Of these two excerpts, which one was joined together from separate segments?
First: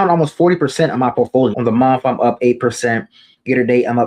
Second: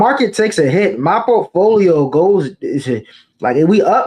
first; 1 cut; at 1.6 s

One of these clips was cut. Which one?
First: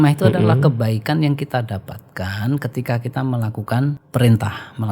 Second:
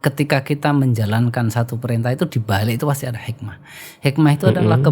first; 1 cut; at 4.0 s

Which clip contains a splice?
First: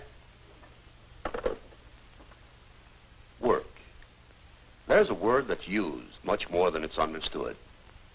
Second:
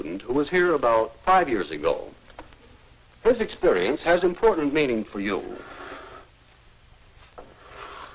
first; 1 cut; at 5.1 s

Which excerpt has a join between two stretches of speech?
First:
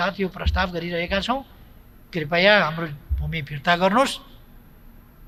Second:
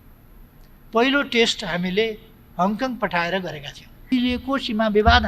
second; 1 cut; at 4.1 s

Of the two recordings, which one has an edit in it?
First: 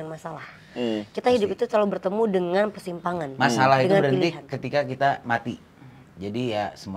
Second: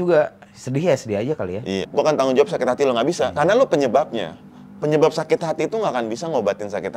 second; 1 cut; at 1.8 s

